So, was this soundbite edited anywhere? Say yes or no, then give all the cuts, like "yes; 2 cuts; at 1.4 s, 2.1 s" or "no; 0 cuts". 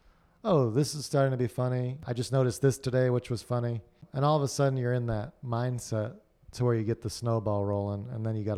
yes; 2 cuts; at 2.1 s, 4.0 s